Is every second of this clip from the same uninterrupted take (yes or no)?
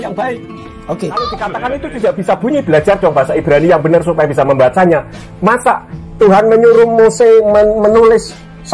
no